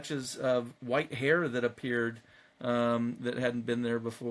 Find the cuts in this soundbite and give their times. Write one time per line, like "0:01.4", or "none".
none